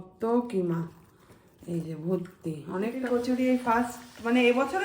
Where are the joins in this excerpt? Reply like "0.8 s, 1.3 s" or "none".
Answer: 3.0 s